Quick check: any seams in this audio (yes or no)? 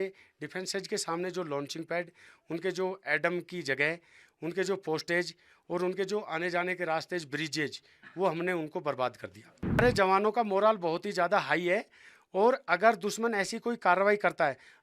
yes